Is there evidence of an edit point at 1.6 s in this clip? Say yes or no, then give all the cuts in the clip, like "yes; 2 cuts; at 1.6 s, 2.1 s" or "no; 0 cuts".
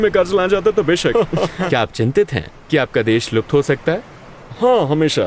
yes; 1 cut; at 1.6 s